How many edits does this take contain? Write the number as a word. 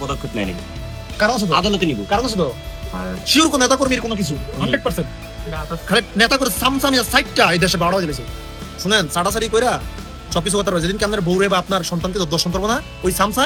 zero